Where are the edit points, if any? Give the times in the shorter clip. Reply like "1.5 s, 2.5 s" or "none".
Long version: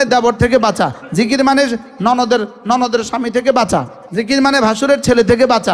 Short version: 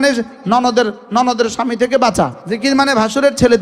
2.4 s

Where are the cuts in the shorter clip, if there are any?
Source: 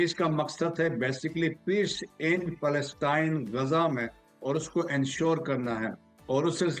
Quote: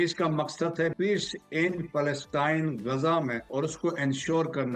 0.9 s, 3.4 s

